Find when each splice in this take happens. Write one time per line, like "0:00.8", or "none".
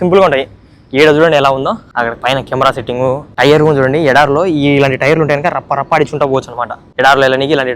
0:01.9
0:03.3
0:06.8